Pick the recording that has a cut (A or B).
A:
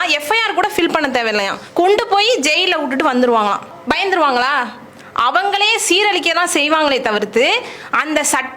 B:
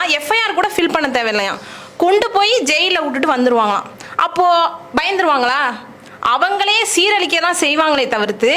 A